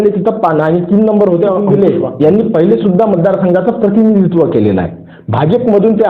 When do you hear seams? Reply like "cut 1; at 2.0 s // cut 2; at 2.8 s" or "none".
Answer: cut 1; at 1.6 s